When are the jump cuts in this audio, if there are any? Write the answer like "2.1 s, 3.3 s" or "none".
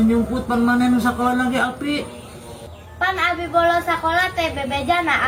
none